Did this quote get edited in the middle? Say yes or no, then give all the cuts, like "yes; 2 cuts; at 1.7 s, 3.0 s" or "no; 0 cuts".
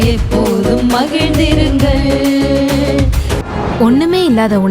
yes; 1 cut; at 3.3 s